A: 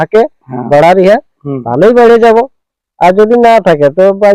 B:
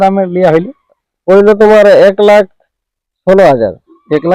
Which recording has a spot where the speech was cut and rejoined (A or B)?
B